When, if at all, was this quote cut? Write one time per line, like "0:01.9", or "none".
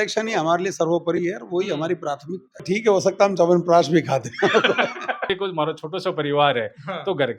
0:02.6
0:05.3